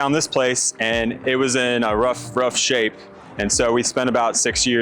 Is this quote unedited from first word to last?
no; 1 cut; at 1.2 s

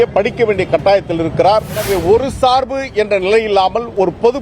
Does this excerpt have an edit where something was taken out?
yes; 1 cut; at 1.8 s

